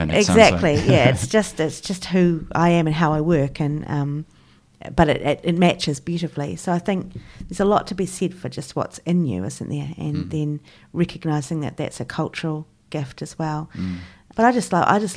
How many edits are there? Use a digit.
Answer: 1